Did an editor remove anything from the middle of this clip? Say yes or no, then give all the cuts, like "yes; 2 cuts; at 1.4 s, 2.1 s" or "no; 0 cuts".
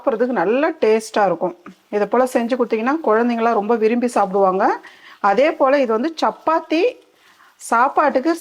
no; 0 cuts